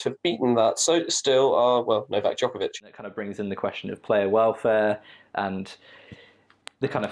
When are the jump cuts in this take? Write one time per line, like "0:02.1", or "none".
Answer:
0:03.1